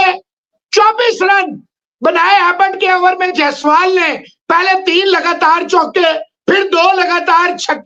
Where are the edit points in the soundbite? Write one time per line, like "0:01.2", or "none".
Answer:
none